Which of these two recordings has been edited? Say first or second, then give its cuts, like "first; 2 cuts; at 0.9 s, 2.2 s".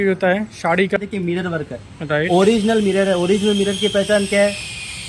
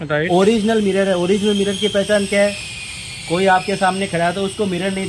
first; 1 cut; at 1.0 s